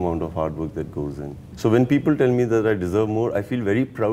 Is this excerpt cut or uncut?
cut